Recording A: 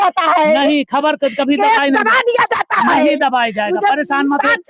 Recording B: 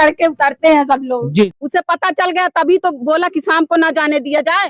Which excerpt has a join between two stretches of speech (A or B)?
B